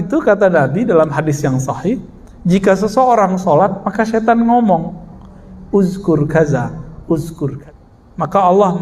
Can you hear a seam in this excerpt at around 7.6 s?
yes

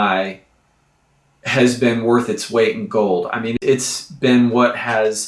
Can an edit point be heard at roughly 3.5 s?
yes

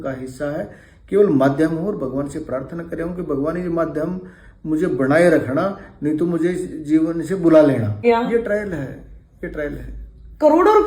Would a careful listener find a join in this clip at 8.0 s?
yes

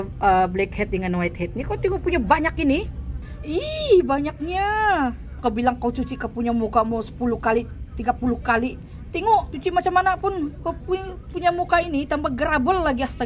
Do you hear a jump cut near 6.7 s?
no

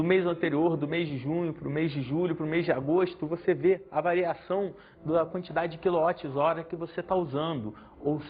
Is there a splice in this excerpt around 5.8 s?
no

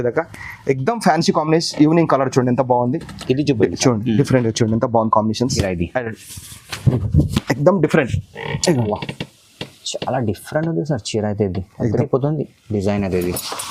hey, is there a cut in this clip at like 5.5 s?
yes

